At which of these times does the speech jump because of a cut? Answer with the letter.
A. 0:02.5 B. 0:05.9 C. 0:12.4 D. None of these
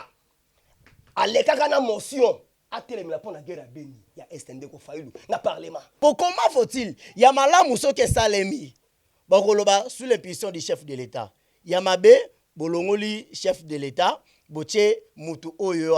B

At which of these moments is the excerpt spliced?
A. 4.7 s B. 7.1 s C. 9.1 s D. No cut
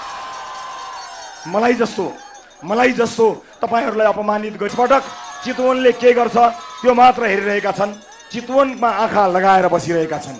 A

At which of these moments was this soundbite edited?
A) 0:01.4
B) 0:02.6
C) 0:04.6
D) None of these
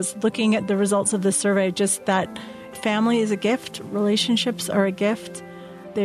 B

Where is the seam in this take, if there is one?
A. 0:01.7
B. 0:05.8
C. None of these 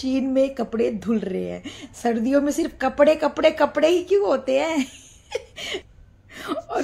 B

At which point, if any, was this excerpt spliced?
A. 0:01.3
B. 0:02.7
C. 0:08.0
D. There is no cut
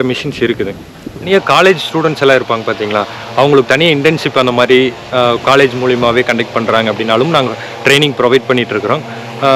A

